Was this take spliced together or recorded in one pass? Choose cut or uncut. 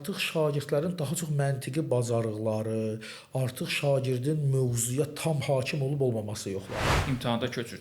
cut